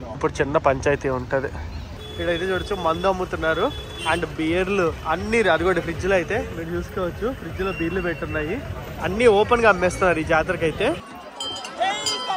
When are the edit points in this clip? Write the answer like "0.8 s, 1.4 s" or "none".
2.0 s, 11.0 s